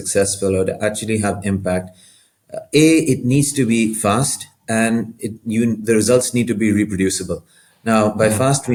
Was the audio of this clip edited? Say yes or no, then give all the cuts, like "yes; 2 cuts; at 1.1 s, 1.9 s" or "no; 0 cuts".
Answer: no; 0 cuts